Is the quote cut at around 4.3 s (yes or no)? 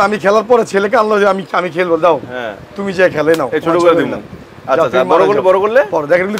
no